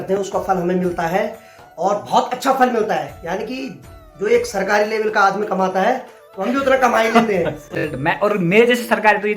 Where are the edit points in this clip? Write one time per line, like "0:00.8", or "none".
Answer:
none